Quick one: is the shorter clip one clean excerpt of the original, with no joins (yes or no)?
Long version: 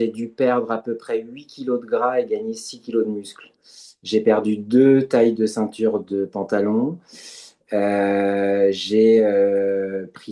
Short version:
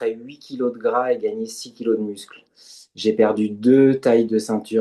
yes